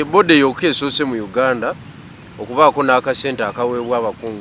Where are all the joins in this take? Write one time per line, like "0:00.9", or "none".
none